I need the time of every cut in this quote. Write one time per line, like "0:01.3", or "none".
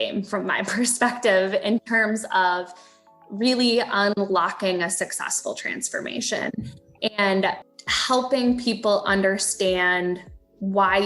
0:07.7